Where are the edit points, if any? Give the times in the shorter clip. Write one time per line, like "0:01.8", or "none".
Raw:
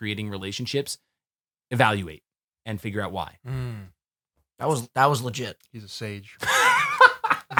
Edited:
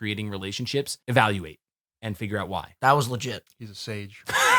0:01.0
0:02.7